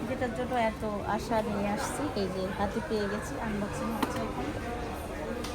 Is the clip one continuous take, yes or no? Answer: yes